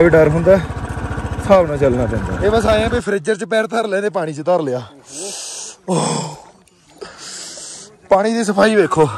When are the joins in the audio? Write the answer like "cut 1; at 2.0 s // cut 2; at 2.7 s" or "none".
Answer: cut 1; at 2.2 s